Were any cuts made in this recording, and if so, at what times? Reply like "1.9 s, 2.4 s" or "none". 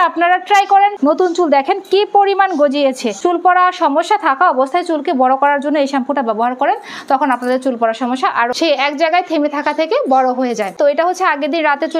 1.0 s, 3.1 s, 8.5 s, 10.7 s